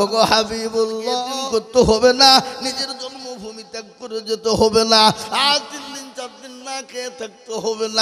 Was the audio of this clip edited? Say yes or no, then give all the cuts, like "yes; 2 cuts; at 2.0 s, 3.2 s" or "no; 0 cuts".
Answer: yes; 1 cut; at 1.0 s